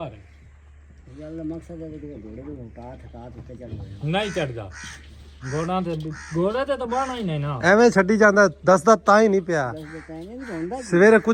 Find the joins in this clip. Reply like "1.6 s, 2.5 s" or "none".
none